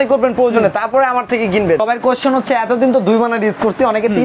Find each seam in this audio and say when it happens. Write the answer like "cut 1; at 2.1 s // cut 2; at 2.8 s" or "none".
cut 1; at 1.8 s